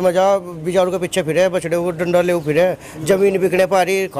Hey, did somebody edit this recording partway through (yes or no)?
no